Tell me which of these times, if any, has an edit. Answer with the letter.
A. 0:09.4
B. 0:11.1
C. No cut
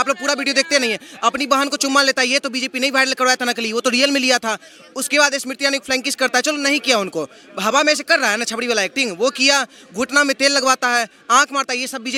C